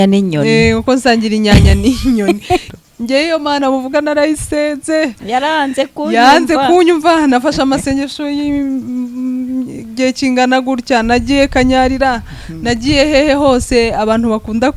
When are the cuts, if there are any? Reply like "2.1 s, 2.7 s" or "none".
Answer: 2.7 s